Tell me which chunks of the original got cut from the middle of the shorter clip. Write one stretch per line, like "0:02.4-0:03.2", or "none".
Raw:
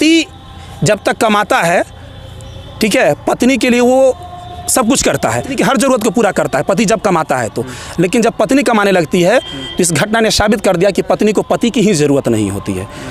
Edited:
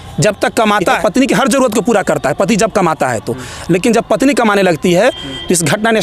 0:01.7-0:05.3